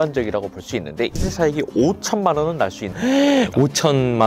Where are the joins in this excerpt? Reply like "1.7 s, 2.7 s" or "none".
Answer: 1.1 s